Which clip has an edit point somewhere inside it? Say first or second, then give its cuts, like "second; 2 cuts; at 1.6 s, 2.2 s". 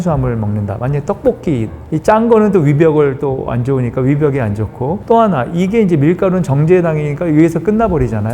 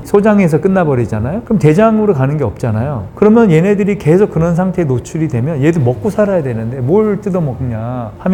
first; 1 cut; at 1.8 s